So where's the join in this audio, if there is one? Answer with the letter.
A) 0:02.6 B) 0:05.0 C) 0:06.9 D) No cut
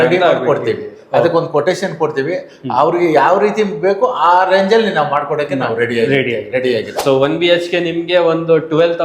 C